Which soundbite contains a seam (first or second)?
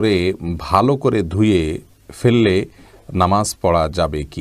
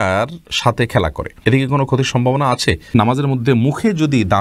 second